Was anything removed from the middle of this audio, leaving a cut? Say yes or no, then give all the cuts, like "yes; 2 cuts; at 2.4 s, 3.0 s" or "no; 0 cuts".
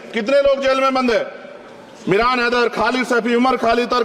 no; 0 cuts